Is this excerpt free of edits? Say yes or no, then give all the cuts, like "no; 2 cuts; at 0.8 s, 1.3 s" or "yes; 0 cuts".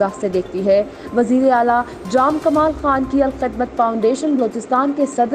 yes; 0 cuts